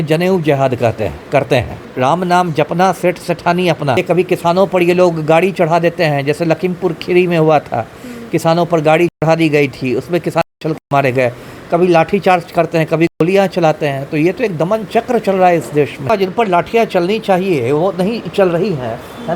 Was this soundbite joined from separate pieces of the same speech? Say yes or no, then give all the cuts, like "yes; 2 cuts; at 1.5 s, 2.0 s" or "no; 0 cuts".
yes; 3 cuts; at 1.8 s, 4.0 s, 16.1 s